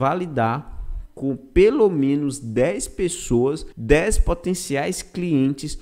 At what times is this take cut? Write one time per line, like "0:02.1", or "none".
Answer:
0:03.7